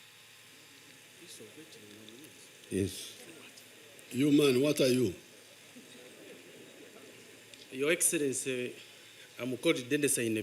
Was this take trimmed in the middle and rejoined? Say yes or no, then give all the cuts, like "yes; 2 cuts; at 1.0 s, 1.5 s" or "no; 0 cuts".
yes; 1 cut; at 1.1 s